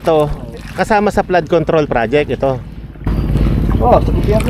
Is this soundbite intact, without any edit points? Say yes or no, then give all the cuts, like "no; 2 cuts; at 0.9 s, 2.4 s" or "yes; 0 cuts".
yes; 0 cuts